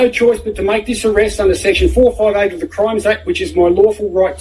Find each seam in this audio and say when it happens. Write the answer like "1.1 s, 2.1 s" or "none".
none